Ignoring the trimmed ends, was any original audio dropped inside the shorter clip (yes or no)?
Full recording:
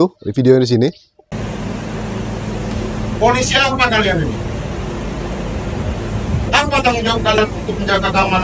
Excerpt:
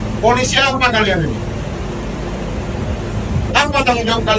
no